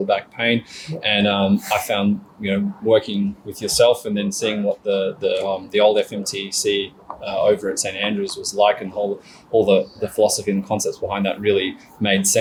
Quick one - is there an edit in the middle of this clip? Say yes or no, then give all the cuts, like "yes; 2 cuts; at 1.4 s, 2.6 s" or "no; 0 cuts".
no; 0 cuts